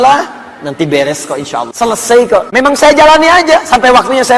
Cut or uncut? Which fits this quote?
cut